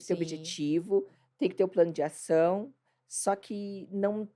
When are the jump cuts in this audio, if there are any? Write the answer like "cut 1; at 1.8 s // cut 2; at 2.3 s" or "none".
none